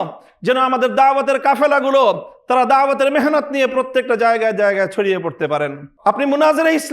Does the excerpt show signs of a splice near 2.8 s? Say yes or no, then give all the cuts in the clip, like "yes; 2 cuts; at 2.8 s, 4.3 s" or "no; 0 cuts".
no; 1 cut; at 5.9 s